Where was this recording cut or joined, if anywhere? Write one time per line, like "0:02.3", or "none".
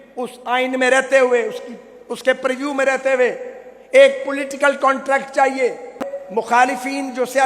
0:06.0